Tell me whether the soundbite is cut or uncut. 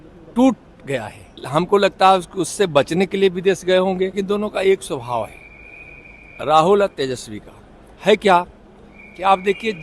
cut